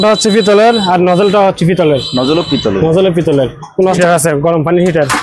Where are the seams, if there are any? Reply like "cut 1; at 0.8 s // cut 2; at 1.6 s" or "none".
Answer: cut 1; at 4.0 s

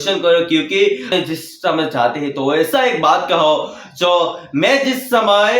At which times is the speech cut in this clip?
cut 1; at 1.1 s

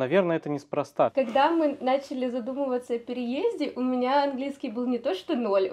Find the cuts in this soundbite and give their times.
cut 1; at 1.1 s

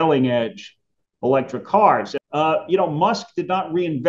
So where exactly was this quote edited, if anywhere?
cut 1; at 2.1 s

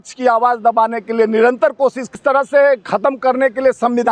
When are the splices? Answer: cut 1; at 2.0 s

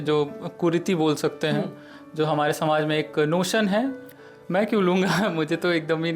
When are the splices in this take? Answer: cut 1; at 4.0 s

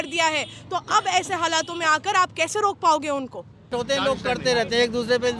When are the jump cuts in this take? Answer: cut 1; at 3.7 s

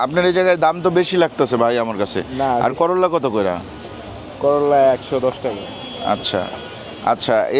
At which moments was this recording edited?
none

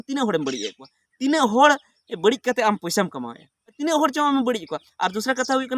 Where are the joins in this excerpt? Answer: cut 1; at 3.8 s

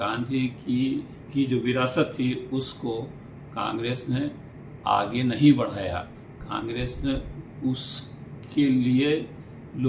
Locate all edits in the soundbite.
cut 1; at 1.2 s

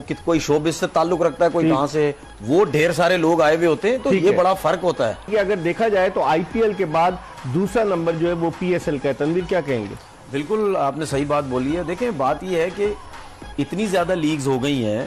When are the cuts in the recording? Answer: none

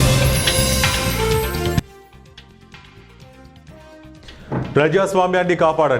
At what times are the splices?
cut 1; at 4.3 s

